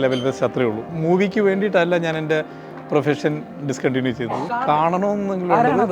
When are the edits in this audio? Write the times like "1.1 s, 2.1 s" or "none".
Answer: 0.9 s, 4.7 s